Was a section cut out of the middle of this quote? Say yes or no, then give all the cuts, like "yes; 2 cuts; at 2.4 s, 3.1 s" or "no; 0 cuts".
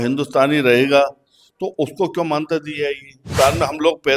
yes; 1 cut; at 3.2 s